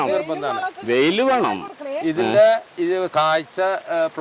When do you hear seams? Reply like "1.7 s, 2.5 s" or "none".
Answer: none